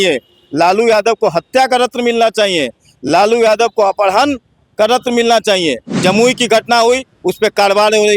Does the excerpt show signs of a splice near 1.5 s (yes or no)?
no